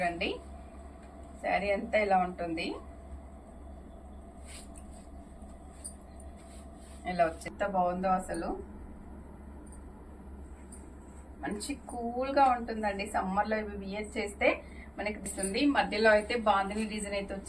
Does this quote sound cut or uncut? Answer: cut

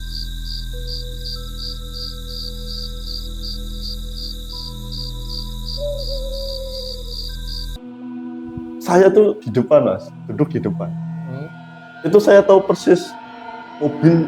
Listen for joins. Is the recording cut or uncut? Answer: cut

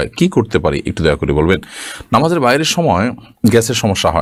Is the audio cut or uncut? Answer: uncut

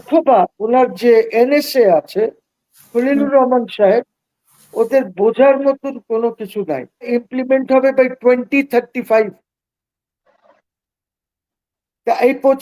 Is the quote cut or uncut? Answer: cut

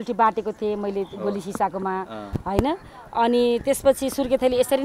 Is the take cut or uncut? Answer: uncut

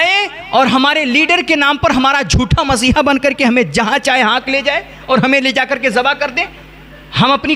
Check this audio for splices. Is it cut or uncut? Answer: uncut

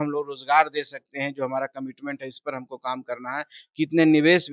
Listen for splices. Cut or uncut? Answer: uncut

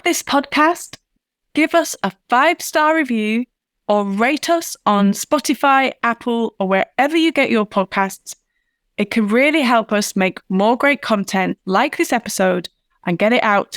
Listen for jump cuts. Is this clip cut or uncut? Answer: uncut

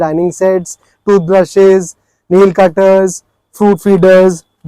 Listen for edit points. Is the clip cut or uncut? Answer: uncut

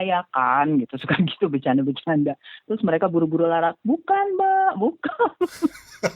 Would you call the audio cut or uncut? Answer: cut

